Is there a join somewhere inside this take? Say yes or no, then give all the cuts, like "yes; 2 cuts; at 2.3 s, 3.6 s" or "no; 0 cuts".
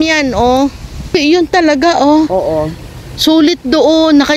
yes; 1 cut; at 1.2 s